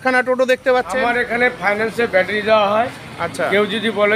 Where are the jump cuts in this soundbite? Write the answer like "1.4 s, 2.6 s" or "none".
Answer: 1.0 s